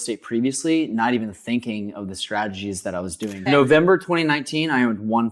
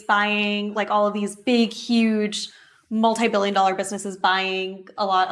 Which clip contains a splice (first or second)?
first